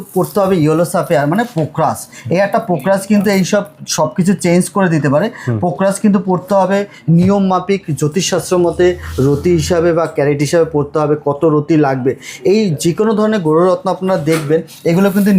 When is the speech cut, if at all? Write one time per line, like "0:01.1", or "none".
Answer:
none